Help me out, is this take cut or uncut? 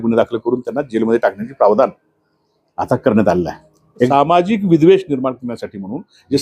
cut